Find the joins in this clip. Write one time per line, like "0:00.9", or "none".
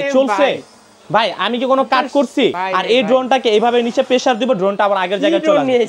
0:02.6

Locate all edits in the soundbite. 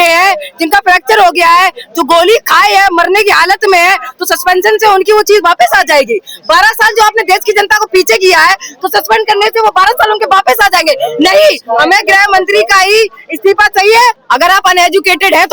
0:14.2

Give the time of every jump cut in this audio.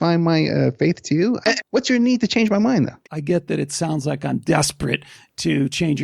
0:01.4
0:03.1

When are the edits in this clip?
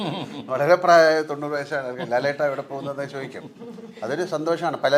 none

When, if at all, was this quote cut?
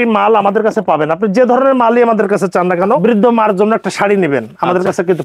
0:03.0

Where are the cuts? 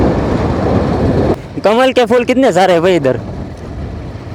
0:01.3

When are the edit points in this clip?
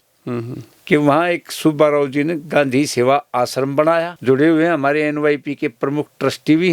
0:04.1

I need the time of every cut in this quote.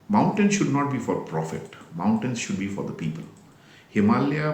none

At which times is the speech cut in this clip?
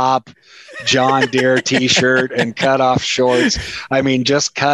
none

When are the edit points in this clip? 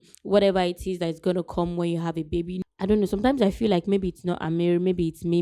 0:02.5

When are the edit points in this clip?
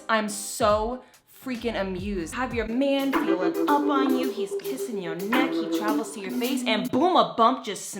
0:02.3

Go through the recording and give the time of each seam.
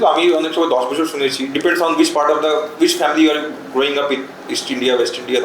none

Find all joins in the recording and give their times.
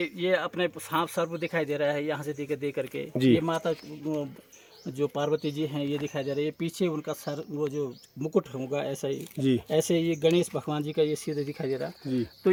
none

